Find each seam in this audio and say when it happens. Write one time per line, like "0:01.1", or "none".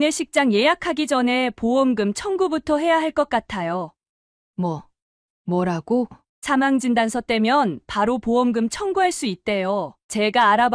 none

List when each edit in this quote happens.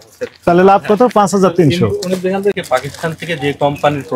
none

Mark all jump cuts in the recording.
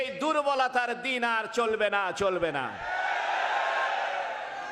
none

